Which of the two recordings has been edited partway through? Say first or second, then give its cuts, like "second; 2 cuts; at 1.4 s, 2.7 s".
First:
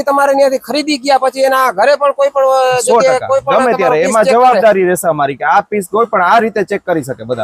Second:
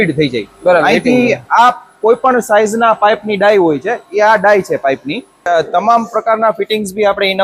second; 1 cut; at 5.5 s